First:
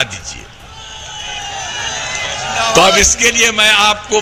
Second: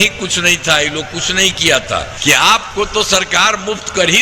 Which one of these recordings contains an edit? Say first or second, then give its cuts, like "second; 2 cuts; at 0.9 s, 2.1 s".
second; 1 cut; at 2.1 s